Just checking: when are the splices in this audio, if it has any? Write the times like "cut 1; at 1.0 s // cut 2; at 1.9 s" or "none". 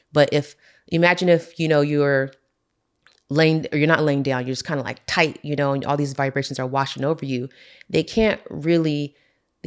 none